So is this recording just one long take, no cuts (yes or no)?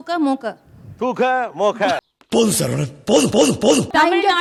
yes